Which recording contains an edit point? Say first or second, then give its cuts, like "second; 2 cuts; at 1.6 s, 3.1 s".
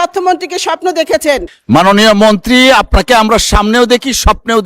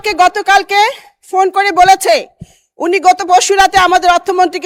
first; 1 cut; at 1.5 s